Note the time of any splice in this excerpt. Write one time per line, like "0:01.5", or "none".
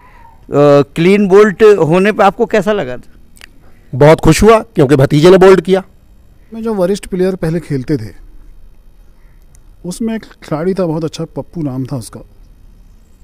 0:06.6